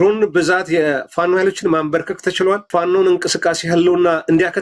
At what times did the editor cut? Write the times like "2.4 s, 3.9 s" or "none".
2.7 s